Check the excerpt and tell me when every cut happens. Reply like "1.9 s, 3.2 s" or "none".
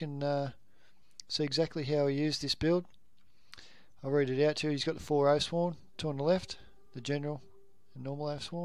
5.5 s

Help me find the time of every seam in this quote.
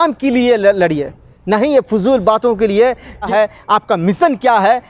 3.3 s

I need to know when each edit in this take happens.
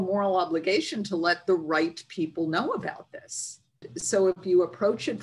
3.9 s

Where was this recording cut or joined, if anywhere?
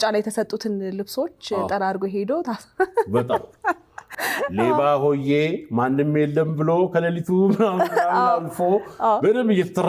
4.2 s

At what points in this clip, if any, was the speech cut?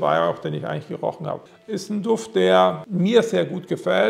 1.4 s

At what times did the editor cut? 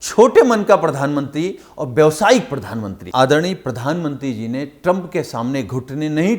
3.0 s

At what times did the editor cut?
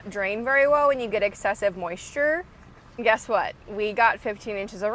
3.0 s

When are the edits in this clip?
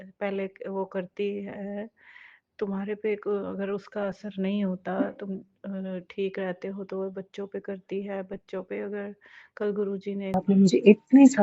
10.4 s

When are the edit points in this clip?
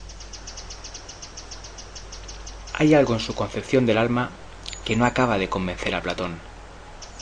none

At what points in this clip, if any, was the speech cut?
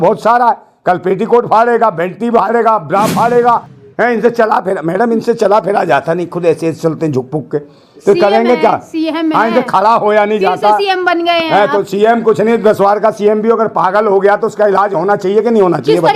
3.8 s

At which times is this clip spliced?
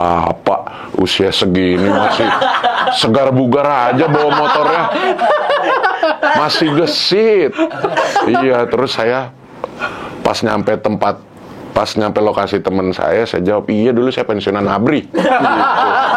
none

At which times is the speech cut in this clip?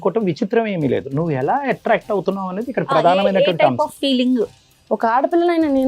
4.5 s

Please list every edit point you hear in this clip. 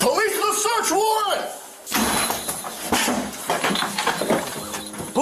1.9 s

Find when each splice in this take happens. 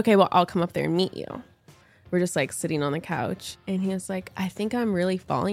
1.9 s, 3.4 s

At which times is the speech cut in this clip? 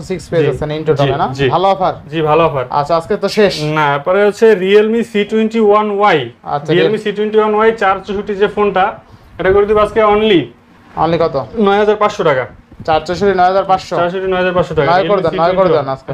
none

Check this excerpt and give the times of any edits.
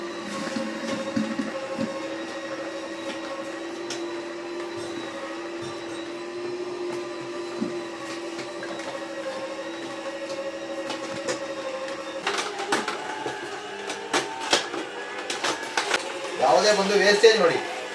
12.2 s, 16.1 s

